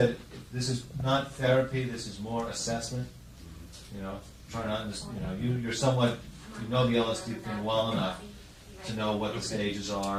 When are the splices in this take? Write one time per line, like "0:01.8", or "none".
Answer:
none